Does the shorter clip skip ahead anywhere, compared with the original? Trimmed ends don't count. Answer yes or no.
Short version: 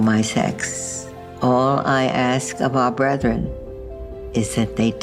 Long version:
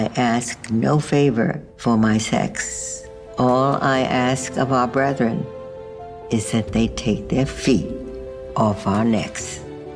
no